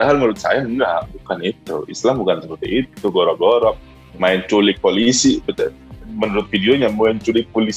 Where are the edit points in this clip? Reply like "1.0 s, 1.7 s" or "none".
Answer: none